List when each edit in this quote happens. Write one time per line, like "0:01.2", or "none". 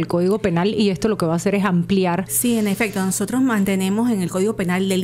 0:02.3